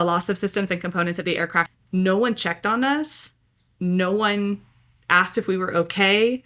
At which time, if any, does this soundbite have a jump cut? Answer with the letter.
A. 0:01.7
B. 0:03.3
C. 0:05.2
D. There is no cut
A